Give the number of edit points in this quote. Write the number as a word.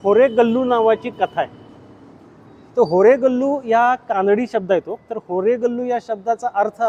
zero